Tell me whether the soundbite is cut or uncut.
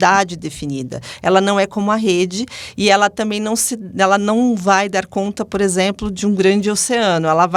uncut